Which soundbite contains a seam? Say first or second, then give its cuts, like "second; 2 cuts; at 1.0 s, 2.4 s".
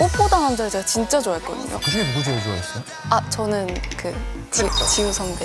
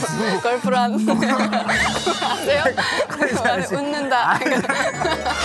first; 1 cut; at 1.7 s